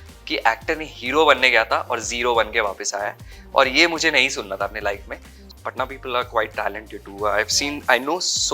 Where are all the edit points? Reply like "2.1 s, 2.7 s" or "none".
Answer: 5.5 s